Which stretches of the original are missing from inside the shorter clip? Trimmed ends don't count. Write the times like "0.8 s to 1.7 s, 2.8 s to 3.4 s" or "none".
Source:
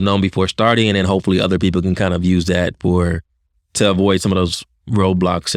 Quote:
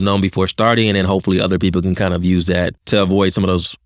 2.8 s to 3.6 s